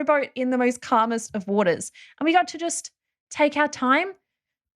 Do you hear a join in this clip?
no; 0 cuts

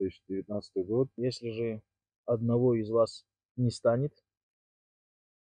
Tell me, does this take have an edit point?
yes; 1 cut; at 1.1 s

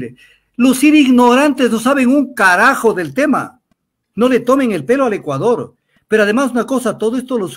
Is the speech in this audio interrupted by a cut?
no; 0 cuts

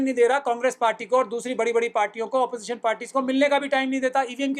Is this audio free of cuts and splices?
yes; 0 cuts

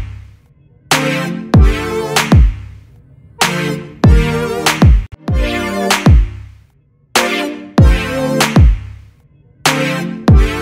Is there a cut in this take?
yes; 1 cut; at 5.1 s

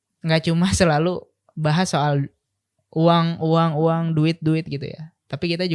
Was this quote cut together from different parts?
no; 0 cuts

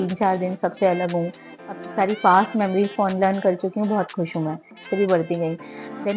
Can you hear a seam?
yes; 1 cut; at 4.8 s

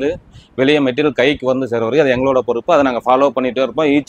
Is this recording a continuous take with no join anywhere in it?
yes; 0 cuts

